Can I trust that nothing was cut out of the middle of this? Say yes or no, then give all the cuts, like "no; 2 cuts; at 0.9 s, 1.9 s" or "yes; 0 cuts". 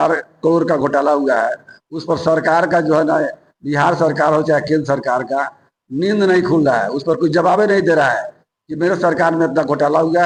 yes; 0 cuts